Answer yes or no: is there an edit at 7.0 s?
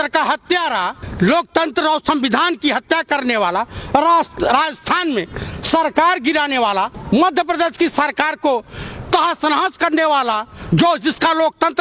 yes